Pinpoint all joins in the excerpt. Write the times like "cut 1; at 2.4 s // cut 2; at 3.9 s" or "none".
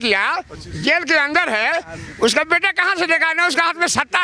none